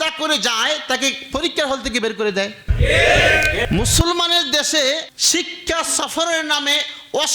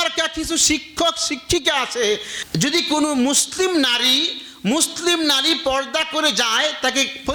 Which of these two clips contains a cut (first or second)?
first